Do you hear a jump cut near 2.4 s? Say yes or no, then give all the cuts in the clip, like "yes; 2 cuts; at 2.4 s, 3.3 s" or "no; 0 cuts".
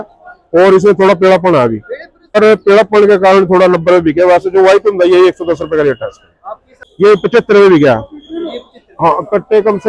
yes; 2 cuts; at 2.4 s, 6.4 s